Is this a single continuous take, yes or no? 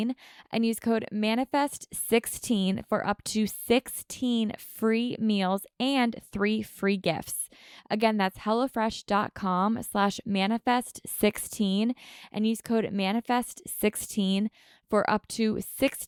yes